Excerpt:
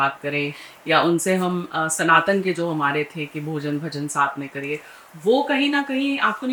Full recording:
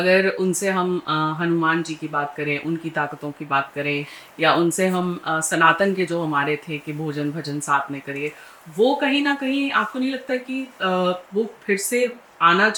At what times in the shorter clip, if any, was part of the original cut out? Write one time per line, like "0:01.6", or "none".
none